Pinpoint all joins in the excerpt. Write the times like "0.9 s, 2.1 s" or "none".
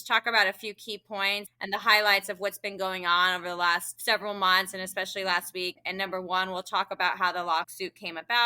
1.5 s

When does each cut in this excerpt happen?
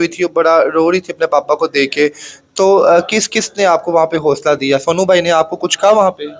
none

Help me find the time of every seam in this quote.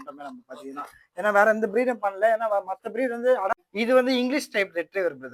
3.5 s

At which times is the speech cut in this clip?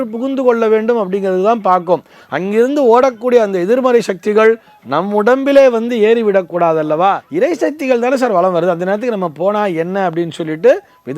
7.3 s

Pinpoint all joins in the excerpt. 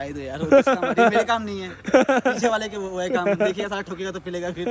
none

